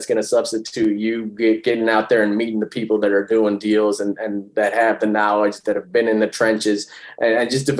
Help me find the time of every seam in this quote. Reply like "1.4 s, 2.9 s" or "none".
none